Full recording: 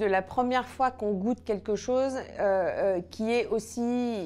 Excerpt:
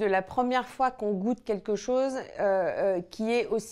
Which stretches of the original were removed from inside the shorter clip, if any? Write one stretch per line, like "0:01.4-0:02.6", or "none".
none